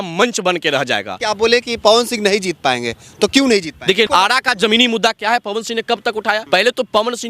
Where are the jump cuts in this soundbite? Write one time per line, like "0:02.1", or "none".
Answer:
0:01.1
0:04.1
0:06.4